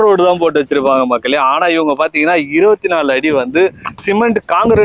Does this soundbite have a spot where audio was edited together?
no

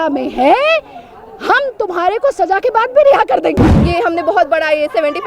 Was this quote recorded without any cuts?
no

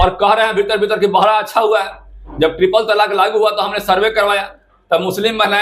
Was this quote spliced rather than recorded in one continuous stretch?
no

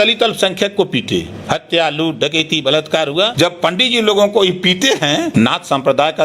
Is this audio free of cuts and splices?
no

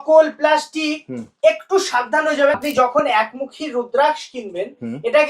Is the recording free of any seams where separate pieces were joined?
no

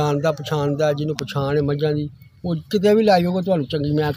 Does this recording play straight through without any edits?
yes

